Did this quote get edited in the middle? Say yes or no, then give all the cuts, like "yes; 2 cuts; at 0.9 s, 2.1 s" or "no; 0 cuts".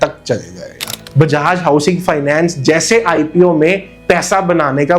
yes; 1 cut; at 0.9 s